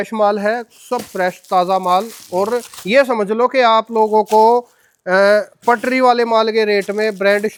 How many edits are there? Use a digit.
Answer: 0